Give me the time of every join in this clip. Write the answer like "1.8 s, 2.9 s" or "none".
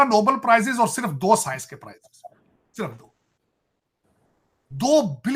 none